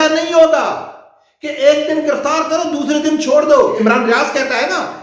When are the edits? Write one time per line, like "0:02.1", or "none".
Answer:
0:03.8